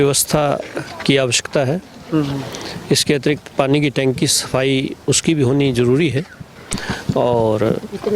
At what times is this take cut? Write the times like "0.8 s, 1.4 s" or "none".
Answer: none

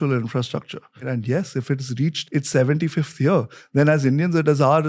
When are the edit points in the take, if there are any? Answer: 1.0 s, 2.2 s

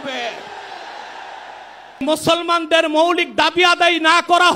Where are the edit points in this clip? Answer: 2.0 s

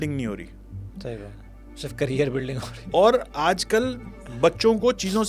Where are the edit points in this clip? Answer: none

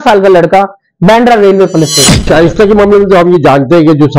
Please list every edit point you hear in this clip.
2.3 s

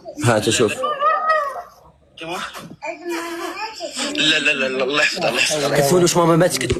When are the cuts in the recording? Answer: none

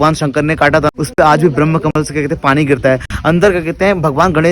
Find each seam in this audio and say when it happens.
0.9 s

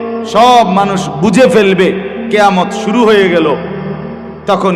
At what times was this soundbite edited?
none

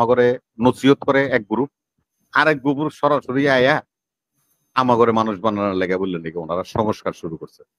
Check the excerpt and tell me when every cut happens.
none

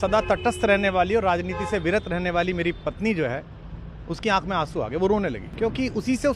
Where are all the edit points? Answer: 5.5 s

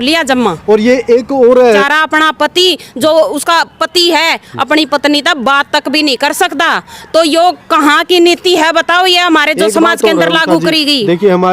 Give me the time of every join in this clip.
1.8 s

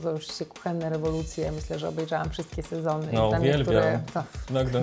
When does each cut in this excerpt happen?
none

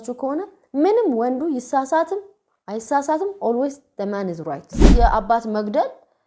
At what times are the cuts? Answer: 4.9 s

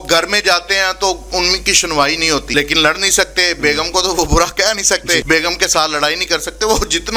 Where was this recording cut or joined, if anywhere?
2.5 s, 5.2 s

